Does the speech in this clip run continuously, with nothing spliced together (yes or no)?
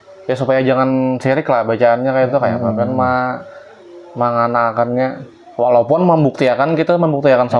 yes